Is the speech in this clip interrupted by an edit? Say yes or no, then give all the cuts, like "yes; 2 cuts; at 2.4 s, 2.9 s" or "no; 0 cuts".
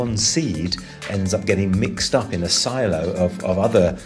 yes; 1 cut; at 0.9 s